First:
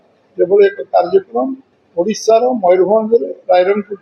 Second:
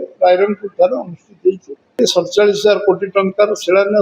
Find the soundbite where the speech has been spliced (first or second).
second